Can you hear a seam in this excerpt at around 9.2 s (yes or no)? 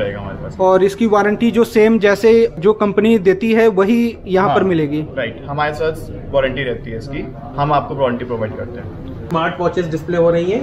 yes